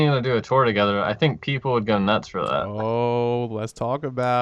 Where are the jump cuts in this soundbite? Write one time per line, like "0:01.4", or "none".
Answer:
none